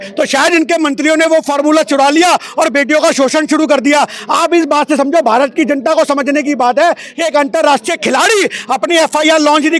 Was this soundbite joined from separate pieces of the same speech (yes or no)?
no